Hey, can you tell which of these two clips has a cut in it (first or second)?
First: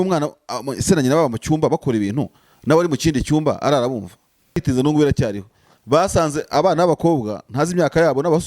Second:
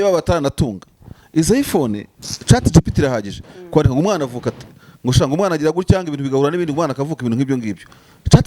first